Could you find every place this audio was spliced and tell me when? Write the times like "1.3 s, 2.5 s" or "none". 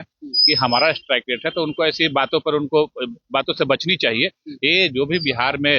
none